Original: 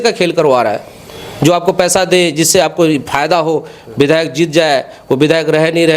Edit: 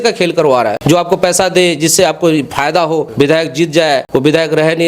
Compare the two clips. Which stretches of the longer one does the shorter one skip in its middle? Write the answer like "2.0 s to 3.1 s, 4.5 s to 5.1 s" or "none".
0.8 s to 1.3 s, 3.6 s to 3.9 s, 4.9 s to 5.0 s